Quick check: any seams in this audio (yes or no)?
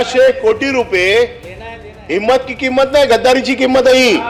no